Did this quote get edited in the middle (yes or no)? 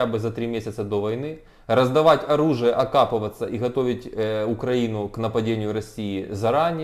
no